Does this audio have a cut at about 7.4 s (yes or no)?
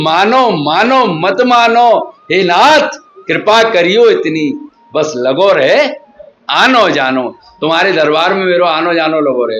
no